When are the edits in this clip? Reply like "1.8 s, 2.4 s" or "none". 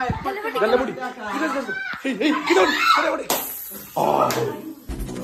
none